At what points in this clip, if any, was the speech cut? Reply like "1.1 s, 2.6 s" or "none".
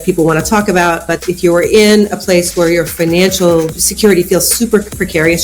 3.8 s